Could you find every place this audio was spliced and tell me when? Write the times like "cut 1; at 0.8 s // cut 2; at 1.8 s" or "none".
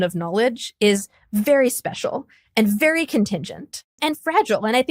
cut 1; at 4.0 s